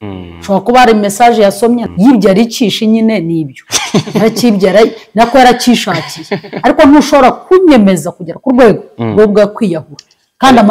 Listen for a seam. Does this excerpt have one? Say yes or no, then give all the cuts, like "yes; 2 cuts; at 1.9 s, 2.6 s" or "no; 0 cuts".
yes; 1 cut; at 1.8 s